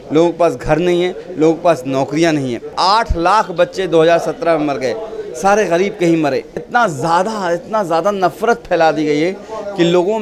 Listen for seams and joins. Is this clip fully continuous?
no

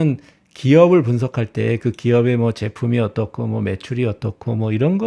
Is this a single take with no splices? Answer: yes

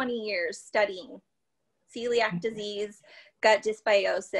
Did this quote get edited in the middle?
no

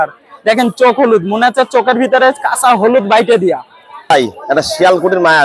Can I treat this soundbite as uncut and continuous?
no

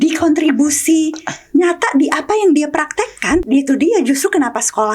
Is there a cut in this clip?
yes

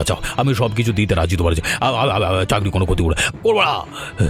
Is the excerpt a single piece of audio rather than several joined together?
yes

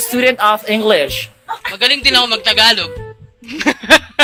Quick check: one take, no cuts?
yes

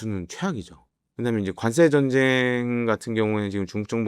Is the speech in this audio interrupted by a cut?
no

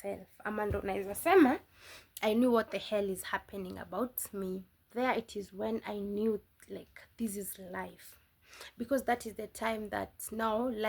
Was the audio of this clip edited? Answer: yes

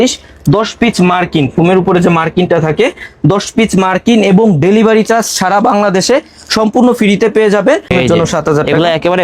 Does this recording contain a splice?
yes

